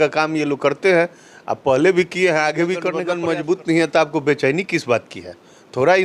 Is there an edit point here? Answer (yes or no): yes